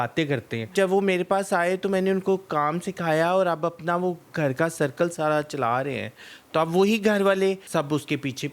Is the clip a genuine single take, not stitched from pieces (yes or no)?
no